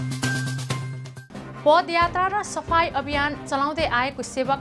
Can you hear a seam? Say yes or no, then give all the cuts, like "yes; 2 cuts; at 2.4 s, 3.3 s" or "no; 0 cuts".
no; 0 cuts